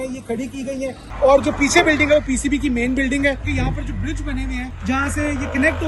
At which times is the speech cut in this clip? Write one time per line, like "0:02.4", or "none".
0:01.0
0:03.5
0:04.7